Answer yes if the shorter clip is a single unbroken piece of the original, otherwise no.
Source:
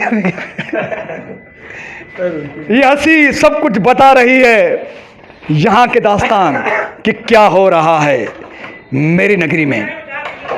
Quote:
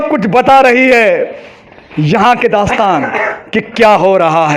yes